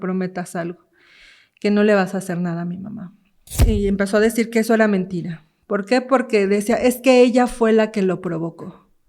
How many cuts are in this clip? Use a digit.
1